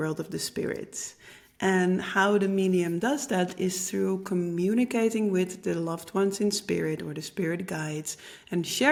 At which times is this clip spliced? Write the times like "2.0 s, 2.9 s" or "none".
none